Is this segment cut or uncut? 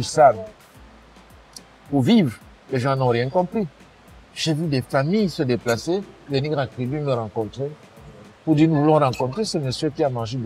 uncut